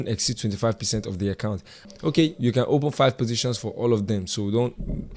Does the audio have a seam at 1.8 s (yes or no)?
yes